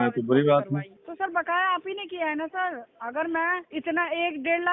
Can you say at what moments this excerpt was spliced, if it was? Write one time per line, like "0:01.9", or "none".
0:01.0
0:03.7